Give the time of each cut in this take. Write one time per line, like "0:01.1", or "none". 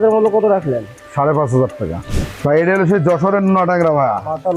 0:02.0